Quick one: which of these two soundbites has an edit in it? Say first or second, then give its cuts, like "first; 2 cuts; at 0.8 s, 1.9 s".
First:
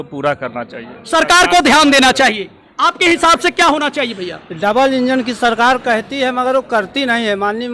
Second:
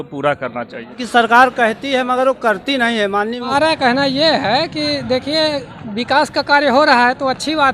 second; 2 cuts; at 1.0 s, 3.5 s